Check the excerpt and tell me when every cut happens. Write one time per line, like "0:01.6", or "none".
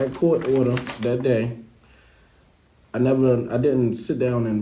none